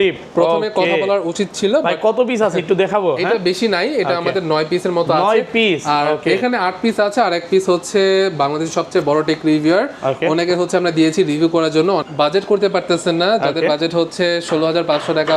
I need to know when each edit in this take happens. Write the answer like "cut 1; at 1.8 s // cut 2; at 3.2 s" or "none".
cut 1; at 12.1 s

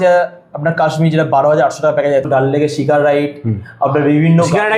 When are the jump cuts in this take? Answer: cut 1; at 2.3 s

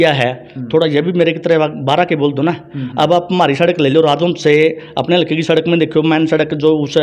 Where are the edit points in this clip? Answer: none

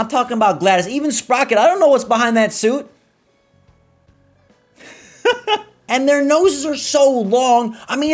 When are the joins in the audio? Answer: cut 1; at 5.7 s

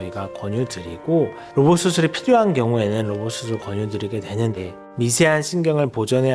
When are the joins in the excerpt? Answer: cut 1; at 1.4 s

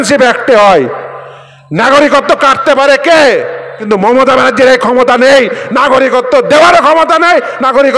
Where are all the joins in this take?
cut 1; at 3.7 s

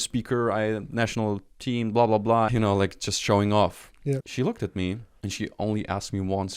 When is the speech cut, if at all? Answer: cut 1; at 2.5 s // cut 2; at 4.2 s // cut 3; at 5.1 s

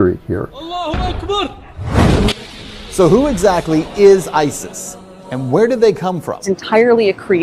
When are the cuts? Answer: none

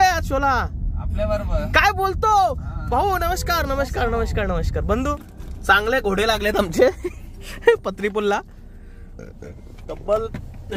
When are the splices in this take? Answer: cut 1; at 5.3 s

